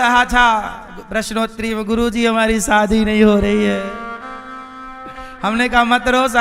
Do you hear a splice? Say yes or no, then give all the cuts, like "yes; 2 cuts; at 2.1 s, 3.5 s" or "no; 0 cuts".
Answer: no; 0 cuts